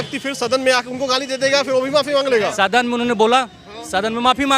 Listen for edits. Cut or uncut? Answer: cut